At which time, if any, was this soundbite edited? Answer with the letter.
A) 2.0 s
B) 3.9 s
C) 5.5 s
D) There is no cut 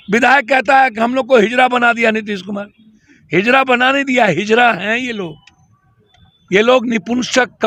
D